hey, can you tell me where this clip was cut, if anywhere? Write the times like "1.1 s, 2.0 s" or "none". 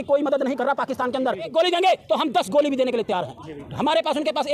1.5 s